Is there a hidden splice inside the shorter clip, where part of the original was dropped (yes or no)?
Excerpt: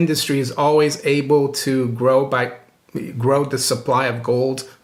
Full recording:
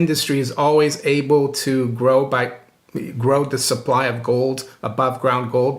no